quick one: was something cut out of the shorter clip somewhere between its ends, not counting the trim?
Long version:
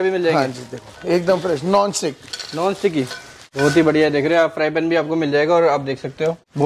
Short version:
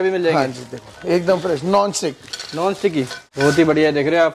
yes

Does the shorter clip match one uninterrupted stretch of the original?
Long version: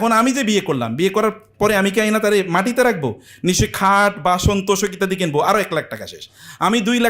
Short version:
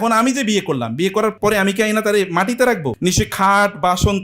no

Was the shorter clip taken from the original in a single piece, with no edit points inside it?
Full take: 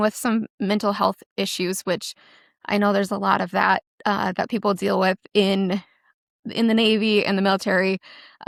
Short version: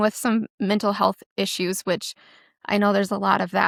yes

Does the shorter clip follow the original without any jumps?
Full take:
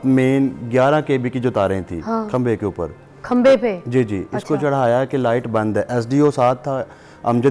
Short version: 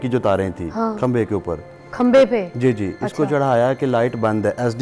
yes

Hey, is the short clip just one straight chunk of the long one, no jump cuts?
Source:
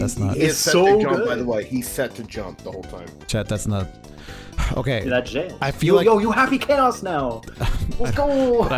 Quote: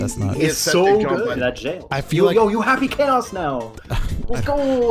no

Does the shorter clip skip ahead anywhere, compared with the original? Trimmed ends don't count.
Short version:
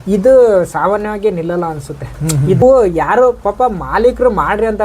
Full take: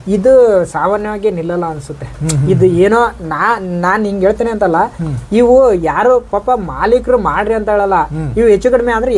yes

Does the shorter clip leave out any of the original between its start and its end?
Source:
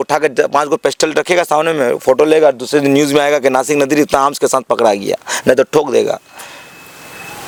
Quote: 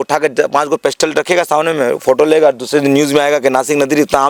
no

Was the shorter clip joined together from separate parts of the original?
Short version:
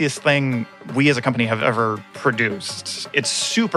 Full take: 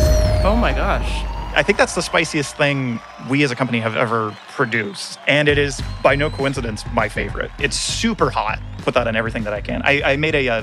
yes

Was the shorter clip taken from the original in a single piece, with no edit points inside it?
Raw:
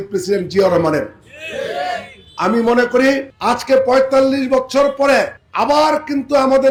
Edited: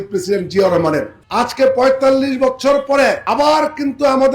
no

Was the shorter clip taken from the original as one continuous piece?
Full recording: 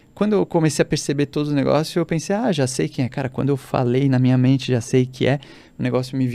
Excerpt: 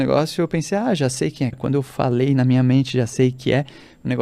no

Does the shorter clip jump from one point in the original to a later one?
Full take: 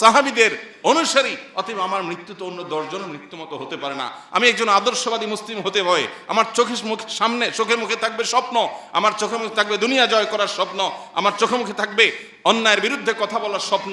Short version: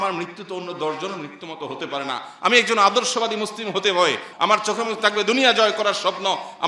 yes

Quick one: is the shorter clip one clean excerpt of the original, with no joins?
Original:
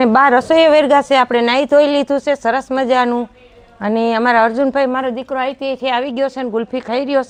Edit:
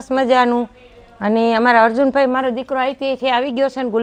yes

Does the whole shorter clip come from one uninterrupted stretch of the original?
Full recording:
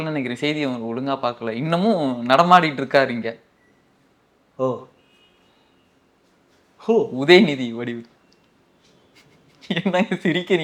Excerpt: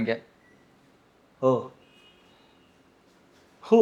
yes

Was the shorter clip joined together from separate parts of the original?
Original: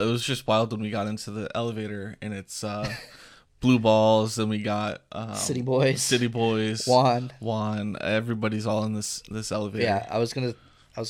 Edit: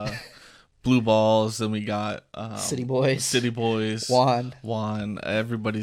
no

